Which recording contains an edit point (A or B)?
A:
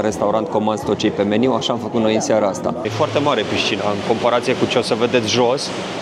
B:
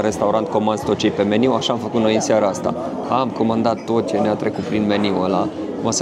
A